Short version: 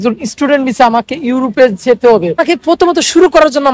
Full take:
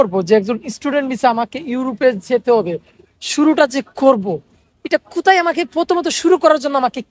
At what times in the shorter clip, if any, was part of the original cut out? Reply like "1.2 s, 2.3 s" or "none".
2.4 s